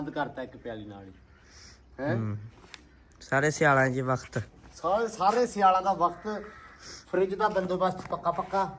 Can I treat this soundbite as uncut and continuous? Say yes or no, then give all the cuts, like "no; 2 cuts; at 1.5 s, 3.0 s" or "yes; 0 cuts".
yes; 0 cuts